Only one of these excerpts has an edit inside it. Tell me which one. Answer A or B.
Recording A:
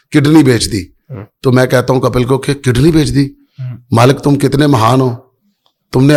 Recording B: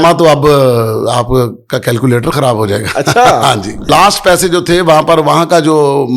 B